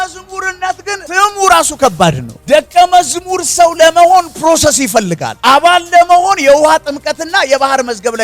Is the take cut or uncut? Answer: cut